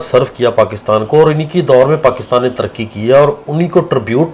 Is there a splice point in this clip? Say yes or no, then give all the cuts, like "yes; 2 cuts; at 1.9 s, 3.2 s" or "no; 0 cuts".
no; 0 cuts